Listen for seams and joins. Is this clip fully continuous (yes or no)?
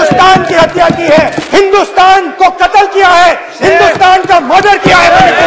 no